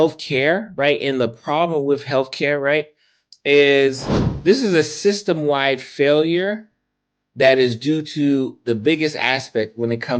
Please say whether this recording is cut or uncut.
uncut